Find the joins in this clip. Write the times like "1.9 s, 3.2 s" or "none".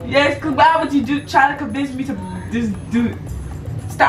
none